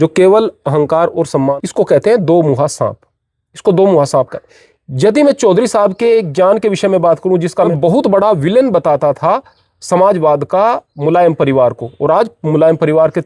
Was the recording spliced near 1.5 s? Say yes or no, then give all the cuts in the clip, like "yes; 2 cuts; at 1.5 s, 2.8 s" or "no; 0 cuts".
yes; 2 cuts; at 1.5 s, 7.7 s